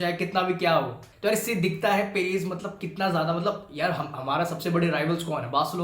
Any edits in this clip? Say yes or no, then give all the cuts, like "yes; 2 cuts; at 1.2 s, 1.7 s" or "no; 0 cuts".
yes; 1 cut; at 1.0 s